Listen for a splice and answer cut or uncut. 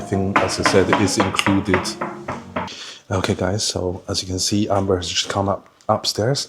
cut